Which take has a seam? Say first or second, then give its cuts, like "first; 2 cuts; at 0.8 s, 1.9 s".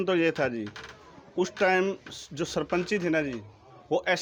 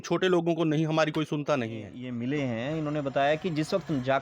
second; 1 cut; at 2.0 s